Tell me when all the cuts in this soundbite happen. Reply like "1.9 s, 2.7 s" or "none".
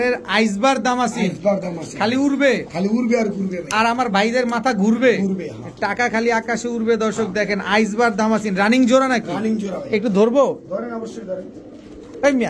none